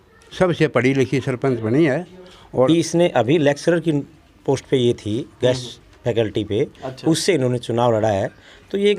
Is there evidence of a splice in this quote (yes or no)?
yes